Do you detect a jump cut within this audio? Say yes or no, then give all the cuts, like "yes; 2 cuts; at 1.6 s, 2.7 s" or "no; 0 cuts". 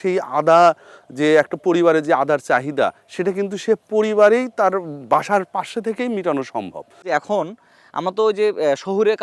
no; 0 cuts